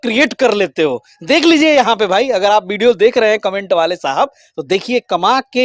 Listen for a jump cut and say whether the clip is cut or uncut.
uncut